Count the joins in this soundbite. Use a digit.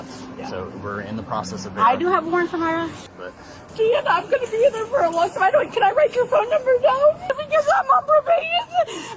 2